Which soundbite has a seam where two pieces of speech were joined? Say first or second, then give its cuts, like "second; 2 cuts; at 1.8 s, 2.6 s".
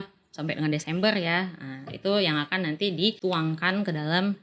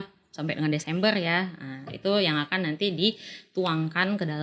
first; 1 cut; at 3.2 s